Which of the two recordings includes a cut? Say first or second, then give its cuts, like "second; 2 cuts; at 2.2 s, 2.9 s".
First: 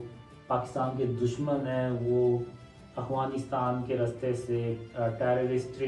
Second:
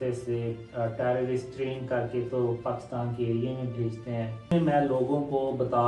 second; 1 cut; at 4.5 s